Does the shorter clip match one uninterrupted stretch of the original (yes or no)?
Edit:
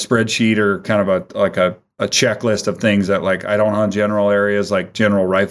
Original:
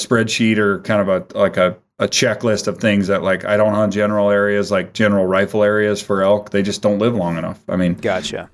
yes